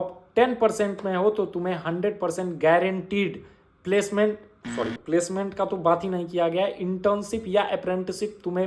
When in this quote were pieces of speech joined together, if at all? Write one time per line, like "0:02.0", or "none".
none